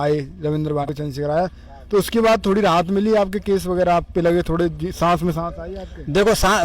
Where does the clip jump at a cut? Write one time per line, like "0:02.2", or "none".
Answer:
0:00.9